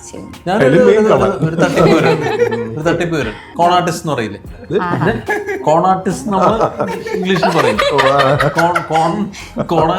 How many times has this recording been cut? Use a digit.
1